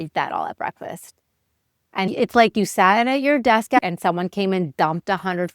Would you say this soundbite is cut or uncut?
cut